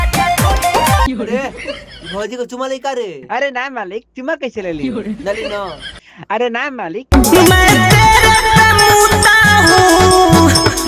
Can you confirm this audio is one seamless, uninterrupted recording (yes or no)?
no